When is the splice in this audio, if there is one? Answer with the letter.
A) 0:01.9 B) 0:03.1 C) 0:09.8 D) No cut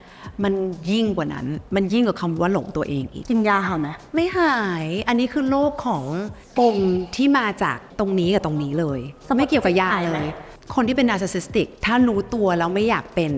B